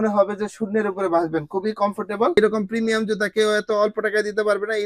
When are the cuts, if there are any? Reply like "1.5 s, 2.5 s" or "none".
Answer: 2.3 s